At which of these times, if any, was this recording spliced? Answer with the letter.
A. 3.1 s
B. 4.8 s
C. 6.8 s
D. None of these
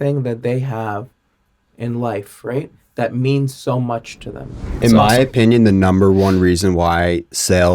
B